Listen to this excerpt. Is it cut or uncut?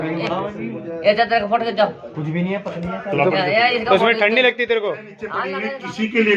cut